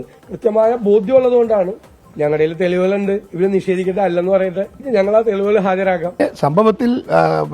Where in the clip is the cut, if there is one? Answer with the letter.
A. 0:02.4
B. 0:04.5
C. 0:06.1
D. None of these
C